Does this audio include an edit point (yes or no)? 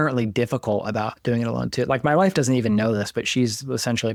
no